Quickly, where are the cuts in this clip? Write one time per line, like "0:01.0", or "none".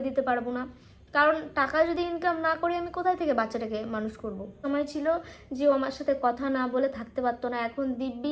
0:04.6